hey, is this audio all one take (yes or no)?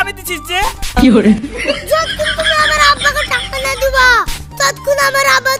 yes